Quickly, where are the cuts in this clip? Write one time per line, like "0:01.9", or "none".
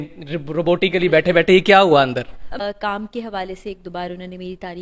0:02.6